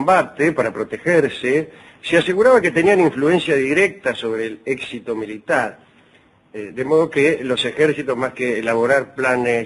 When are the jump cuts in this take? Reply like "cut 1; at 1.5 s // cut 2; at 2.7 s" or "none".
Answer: cut 1; at 3.2 s